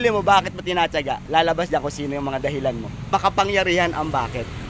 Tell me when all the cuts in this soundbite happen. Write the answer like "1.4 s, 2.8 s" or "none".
3.1 s